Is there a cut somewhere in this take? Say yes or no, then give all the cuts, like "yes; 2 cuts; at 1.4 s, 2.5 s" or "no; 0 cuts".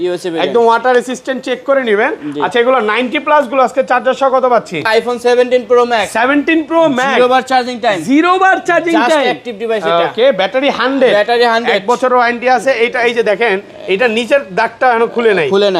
yes; 1 cut; at 4.9 s